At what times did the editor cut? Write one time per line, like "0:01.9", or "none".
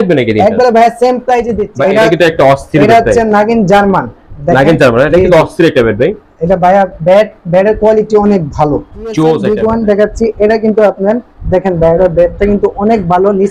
0:01.6
0:09.4